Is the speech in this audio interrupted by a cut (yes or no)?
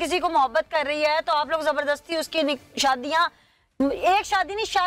no